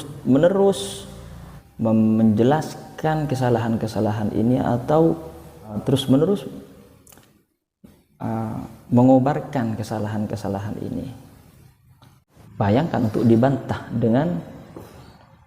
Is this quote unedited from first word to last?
no; 2 cuts; at 5.8 s, 12.2 s

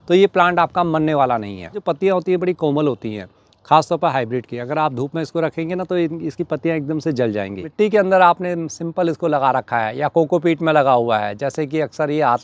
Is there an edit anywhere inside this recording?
yes; 2 cuts; at 1.8 s, 7.7 s

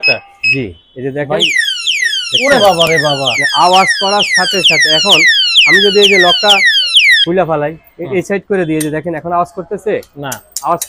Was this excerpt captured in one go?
yes; 0 cuts

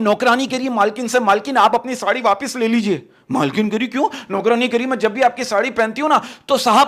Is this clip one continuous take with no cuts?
yes; 0 cuts

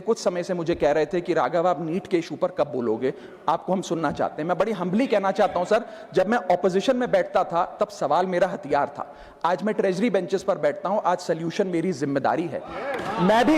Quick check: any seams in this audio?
no; 0 cuts

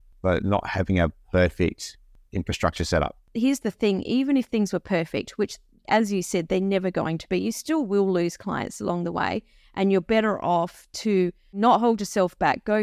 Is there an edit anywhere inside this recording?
yes; 2 cuts; at 3.2 s, 11.6 s

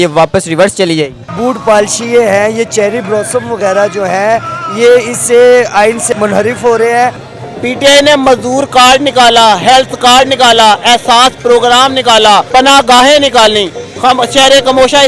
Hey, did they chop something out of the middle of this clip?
yes; 4 cuts; at 1.2 s, 6.0 s, 7.2 s, 12.5 s

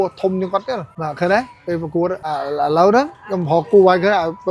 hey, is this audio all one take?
no; 2 cuts; at 1.0 s, 2.2 s

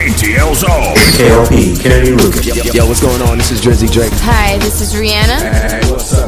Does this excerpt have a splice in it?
no; 0 cuts

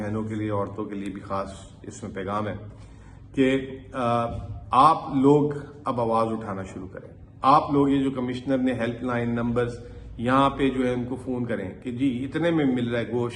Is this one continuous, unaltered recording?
yes; 0 cuts

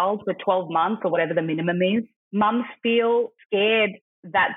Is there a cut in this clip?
yes; 2 cuts; at 2.2 s, 3.4 s

